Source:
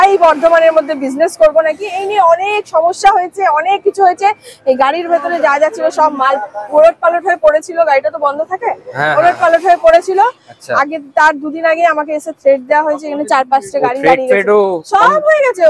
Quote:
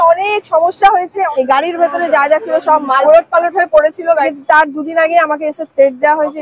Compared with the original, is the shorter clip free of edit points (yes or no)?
no